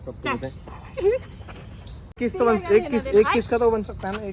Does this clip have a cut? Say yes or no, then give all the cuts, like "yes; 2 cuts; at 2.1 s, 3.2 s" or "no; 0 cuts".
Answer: yes; 1 cut; at 2.2 s